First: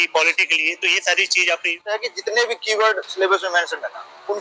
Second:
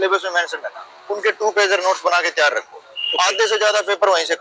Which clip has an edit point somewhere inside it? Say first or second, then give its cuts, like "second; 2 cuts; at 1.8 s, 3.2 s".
first; 1 cut; at 2.0 s